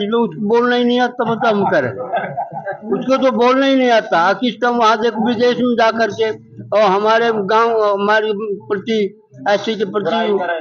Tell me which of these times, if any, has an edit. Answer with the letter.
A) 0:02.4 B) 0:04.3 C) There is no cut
C